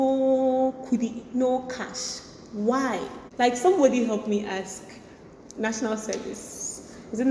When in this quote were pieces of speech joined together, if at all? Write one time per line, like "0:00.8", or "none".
0:03.2